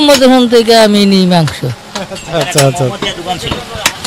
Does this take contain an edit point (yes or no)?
no